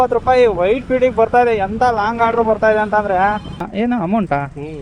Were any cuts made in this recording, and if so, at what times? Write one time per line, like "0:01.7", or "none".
0:03.7